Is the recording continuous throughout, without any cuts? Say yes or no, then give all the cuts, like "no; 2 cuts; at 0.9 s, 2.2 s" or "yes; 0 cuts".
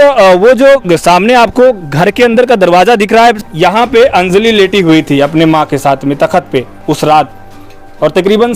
no; 1 cut; at 3.4 s